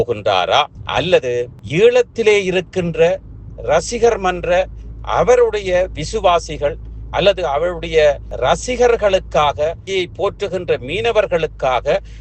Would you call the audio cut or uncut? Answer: cut